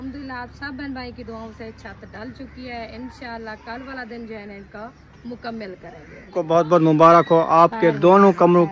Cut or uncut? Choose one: cut